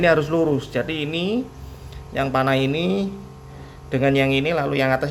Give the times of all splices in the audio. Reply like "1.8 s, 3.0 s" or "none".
none